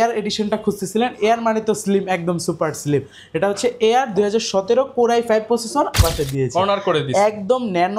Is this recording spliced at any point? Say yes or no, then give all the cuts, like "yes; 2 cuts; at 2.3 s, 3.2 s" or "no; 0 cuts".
yes; 1 cut; at 6.0 s